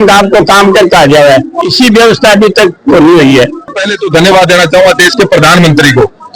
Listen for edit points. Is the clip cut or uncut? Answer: cut